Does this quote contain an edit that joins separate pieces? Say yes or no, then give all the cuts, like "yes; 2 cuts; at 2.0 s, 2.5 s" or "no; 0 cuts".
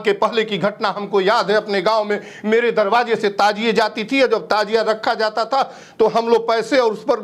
no; 0 cuts